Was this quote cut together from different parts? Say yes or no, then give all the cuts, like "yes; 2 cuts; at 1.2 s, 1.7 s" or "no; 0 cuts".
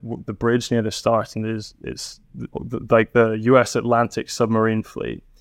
no; 0 cuts